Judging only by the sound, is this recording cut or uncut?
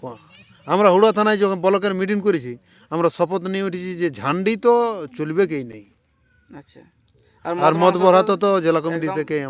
uncut